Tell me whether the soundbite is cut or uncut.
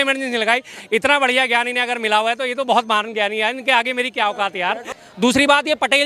cut